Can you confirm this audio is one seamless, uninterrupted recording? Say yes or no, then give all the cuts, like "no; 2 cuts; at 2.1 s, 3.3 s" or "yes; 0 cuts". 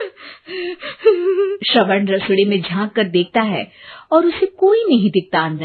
no; 1 cut; at 1.6 s